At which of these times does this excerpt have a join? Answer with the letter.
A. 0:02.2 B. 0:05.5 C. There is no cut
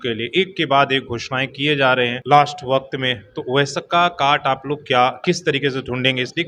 A